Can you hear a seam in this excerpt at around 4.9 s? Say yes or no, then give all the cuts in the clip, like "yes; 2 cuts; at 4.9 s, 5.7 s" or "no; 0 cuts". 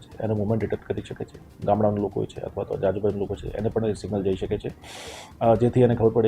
no; 1 cut; at 1.5 s